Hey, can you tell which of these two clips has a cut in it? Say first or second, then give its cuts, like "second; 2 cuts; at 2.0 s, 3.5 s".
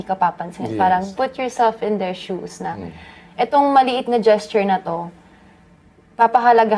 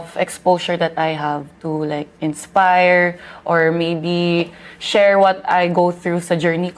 first; 1 cut; at 1.1 s